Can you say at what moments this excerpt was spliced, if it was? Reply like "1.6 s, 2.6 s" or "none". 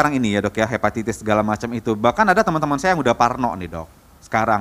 none